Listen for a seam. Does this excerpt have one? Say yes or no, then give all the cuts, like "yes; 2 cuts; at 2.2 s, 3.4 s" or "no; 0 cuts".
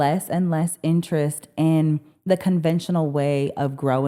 no; 0 cuts